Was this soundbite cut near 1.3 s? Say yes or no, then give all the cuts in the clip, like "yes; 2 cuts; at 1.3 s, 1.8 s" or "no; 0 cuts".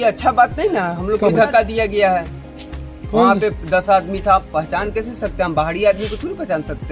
yes; 1 cut; at 1.3 s